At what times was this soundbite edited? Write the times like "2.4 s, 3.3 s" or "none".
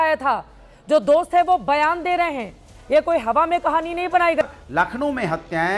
4.4 s